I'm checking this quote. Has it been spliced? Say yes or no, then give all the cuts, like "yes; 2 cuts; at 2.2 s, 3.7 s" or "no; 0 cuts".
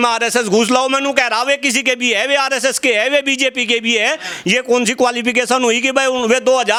no; 0 cuts